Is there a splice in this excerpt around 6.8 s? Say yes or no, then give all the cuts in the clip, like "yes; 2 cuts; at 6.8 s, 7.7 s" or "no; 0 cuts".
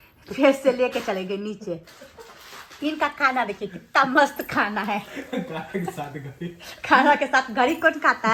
no; 0 cuts